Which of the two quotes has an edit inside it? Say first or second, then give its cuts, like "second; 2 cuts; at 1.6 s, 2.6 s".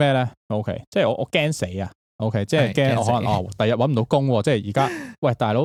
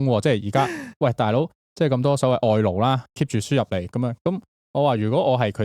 second; 2 cuts; at 3.0 s, 4.5 s